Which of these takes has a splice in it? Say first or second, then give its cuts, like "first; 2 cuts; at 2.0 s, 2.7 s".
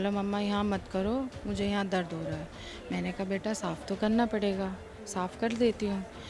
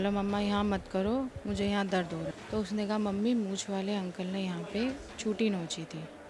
second; 1 cut; at 2.4 s